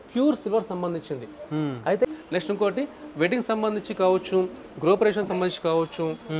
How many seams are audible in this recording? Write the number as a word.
one